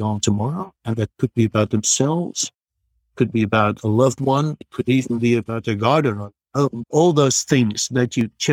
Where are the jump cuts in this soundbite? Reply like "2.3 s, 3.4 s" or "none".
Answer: 4.7 s, 6.8 s